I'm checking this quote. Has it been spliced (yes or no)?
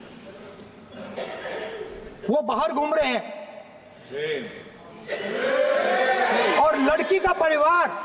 no